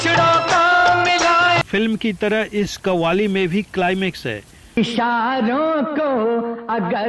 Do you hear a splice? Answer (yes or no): yes